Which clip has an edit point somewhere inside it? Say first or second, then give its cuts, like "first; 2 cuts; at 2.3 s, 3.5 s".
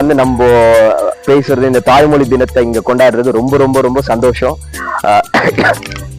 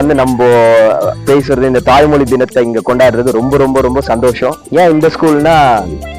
second; 1 cut; at 4.6 s